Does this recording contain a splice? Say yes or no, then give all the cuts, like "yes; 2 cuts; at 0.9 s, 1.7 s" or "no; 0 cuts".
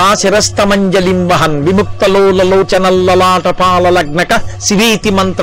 no; 0 cuts